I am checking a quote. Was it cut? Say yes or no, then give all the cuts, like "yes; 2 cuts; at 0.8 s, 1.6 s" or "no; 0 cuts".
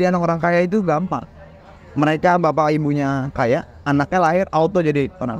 no; 0 cuts